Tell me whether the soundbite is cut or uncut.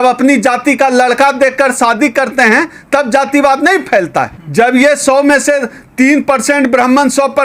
cut